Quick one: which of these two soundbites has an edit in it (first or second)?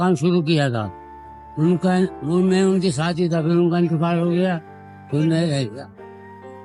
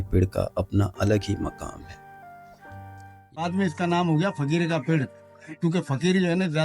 second